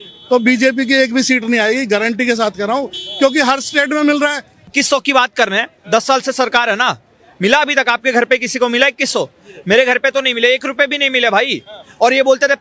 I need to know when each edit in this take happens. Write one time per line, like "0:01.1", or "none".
0:04.7